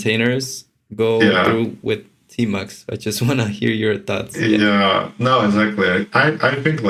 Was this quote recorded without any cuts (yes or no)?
yes